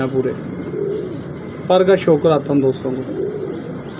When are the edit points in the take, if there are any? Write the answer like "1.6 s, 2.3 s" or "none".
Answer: none